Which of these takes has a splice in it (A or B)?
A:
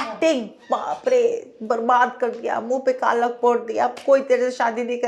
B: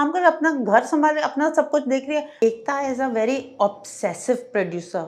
B